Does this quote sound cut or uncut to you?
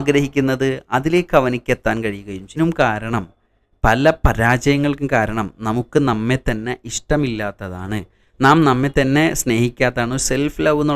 cut